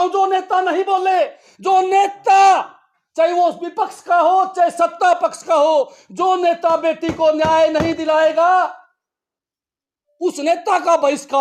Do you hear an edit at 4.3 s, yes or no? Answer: no